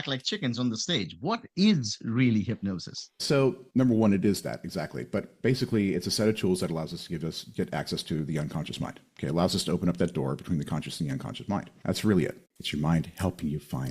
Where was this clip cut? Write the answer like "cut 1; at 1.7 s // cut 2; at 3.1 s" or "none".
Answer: cut 1; at 12.4 s